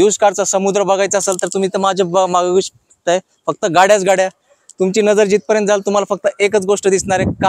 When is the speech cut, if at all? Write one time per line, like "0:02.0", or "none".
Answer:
none